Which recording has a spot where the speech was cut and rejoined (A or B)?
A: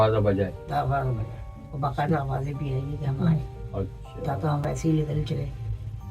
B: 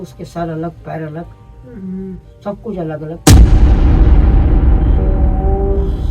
A